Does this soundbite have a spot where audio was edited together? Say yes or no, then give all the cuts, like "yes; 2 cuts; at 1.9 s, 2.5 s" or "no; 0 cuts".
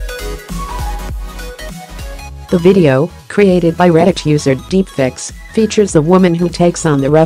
yes; 1 cut; at 2.4 s